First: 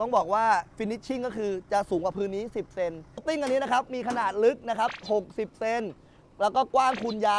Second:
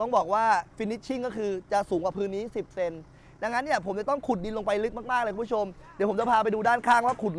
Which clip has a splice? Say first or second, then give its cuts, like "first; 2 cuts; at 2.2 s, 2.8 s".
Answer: first; 1 cut; at 3.1 s